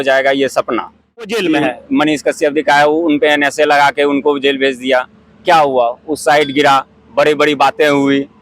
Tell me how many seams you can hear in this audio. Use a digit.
1